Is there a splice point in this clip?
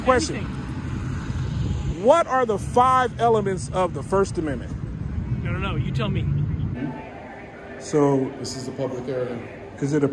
yes; 1 cut; at 6.7 s

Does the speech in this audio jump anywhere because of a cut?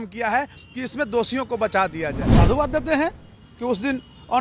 yes; 1 cut; at 2.2 s

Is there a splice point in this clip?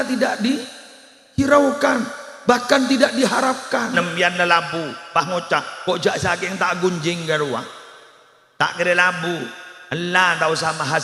yes; 1 cut; at 4.0 s

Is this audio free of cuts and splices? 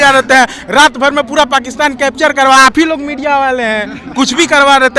yes; 0 cuts

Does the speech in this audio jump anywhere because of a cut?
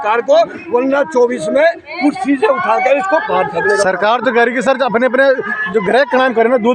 no; 0 cuts

